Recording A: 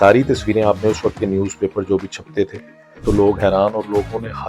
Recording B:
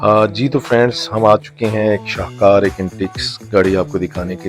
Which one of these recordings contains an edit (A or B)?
A